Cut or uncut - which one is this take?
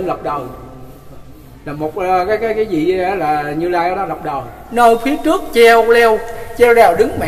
cut